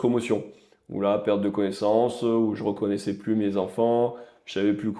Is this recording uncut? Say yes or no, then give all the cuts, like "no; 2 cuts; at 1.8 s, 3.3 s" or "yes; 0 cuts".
yes; 0 cuts